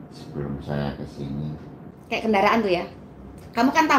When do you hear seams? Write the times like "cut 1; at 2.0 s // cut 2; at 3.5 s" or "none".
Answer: cut 1; at 1.8 s